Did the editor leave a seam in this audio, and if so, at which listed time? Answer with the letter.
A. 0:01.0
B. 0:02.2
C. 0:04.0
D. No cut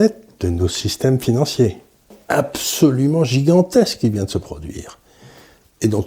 B